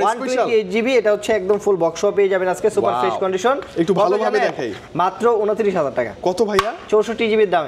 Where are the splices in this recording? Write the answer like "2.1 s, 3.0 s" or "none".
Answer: none